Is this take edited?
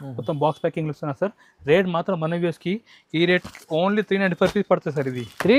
no; 0 cuts

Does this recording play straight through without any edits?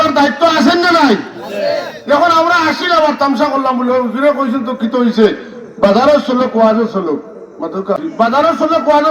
no; 1 cut; at 8.0 s

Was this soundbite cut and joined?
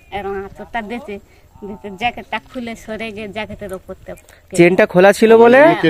no; 0 cuts

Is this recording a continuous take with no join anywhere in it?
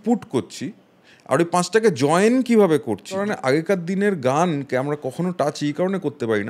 no; 1 cut; at 3.2 s

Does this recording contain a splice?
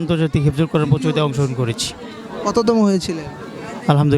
no; 0 cuts

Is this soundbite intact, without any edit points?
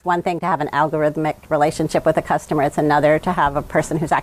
yes; 0 cuts

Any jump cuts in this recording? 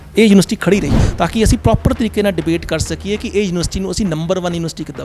yes; 1 cut; at 1.0 s

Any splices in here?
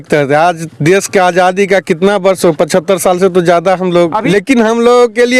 yes; 1 cut; at 4.2 s

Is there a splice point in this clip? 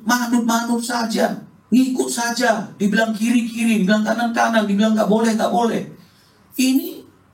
yes; 1 cut; at 1.5 s

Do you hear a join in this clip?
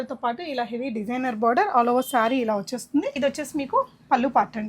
yes; 1 cut; at 3.1 s

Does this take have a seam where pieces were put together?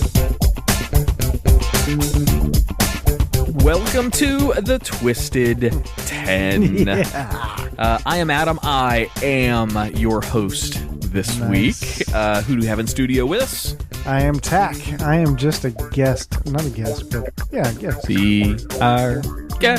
yes; 1 cut; at 14.4 s

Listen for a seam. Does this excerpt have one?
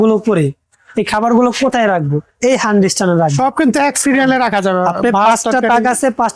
no; 0 cuts

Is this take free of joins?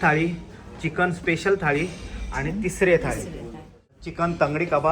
no; 1 cut; at 4.0 s

